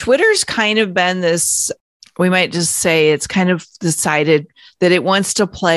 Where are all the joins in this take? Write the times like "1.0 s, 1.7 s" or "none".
none